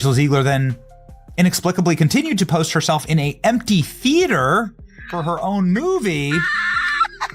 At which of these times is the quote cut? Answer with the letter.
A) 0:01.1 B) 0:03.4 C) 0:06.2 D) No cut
D